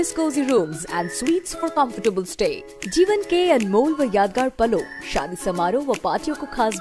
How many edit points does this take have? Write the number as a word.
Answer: zero